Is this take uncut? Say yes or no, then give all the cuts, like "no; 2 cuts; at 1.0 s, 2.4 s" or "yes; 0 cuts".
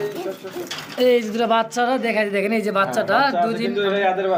yes; 0 cuts